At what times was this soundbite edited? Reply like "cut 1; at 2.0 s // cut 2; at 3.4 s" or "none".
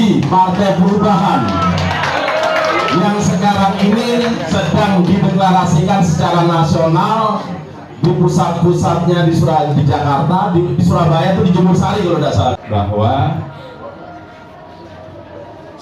cut 1; at 12.6 s